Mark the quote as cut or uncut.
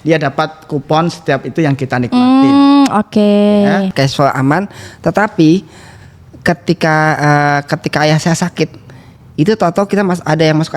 cut